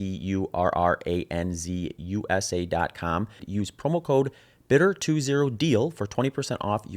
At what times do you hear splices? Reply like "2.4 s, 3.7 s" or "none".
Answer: 3.4 s